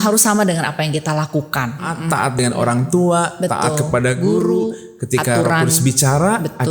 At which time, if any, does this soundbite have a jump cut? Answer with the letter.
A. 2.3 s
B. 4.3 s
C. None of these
A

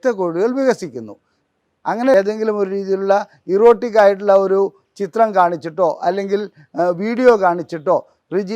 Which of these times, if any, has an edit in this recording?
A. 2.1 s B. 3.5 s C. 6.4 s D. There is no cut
A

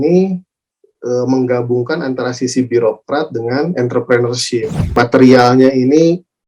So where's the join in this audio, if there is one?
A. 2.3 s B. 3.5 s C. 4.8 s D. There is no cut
C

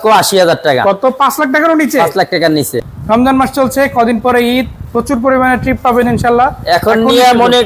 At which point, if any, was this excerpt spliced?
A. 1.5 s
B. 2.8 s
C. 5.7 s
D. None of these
B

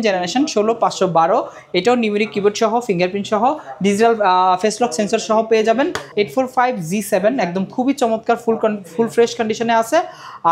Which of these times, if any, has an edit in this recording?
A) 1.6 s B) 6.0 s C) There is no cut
B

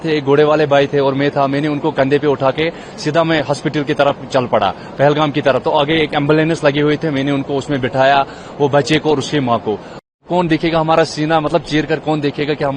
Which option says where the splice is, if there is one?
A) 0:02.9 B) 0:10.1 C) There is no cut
B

